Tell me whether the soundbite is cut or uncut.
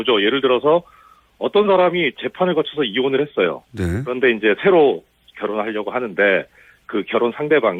uncut